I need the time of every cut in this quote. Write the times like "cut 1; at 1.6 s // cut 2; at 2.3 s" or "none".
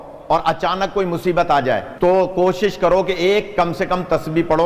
cut 1; at 1.9 s